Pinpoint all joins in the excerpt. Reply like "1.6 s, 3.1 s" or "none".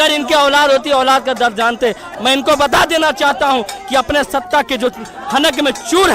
2.1 s